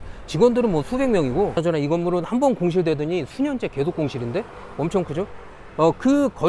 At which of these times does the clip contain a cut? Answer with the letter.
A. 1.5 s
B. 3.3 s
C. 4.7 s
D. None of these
A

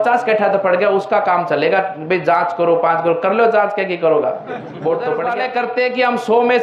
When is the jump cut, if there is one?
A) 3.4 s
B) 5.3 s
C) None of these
B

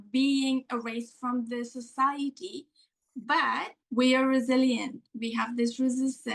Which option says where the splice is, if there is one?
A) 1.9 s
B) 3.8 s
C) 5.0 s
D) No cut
B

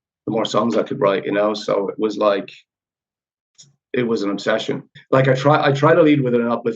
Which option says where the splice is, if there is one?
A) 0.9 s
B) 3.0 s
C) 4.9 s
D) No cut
C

